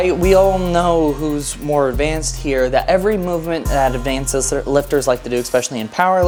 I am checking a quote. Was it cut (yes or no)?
no